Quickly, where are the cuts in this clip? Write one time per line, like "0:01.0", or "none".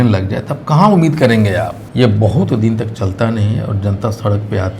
0:01.8